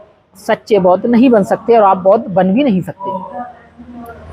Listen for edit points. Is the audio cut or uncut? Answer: uncut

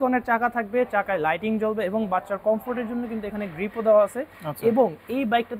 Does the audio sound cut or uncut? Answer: uncut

